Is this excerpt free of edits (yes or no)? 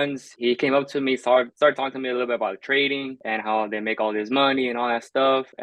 yes